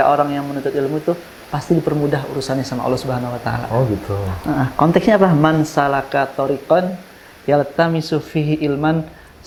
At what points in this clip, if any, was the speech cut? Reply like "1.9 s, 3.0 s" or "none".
none